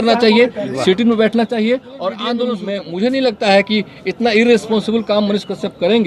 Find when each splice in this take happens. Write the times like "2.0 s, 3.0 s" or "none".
2.5 s

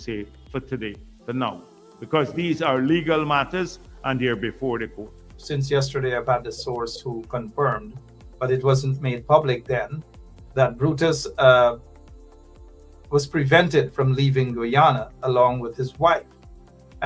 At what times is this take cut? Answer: 5.4 s

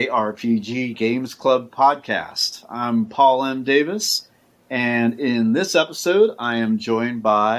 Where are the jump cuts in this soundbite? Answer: none

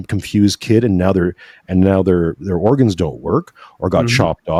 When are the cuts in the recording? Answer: none

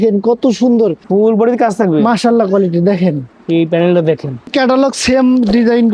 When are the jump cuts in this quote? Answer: 1.0 s, 4.5 s

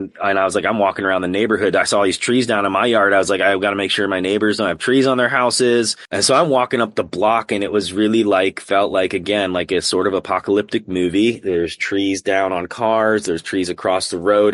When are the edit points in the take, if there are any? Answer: 6.0 s

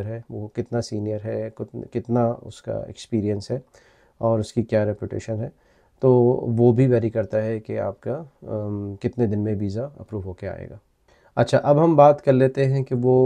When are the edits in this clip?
none

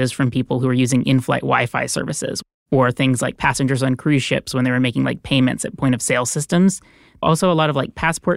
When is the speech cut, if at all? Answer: 2.4 s, 7.2 s

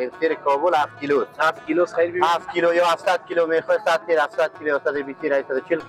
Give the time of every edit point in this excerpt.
none

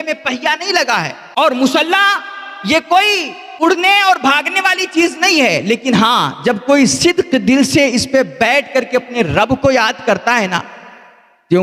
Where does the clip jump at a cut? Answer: none

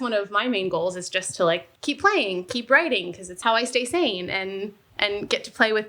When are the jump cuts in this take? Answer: 1.7 s, 3.3 s

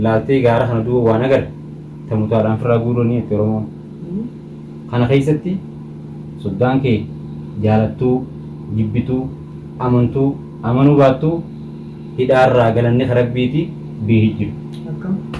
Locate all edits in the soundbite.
none

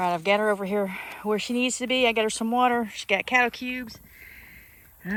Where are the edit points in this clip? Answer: none

